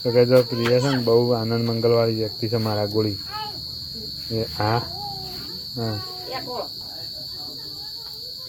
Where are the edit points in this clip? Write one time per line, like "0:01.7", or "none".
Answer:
none